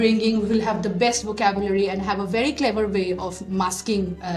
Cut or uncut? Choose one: uncut